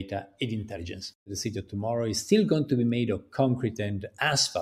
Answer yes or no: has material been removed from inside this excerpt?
yes